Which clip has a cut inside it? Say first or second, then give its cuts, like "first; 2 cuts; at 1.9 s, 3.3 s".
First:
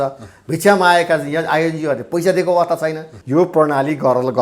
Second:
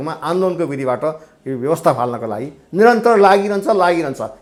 first; 1 cut; at 3.1 s